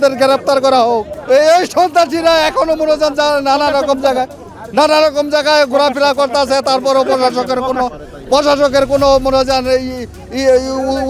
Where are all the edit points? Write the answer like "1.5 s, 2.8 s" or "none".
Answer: none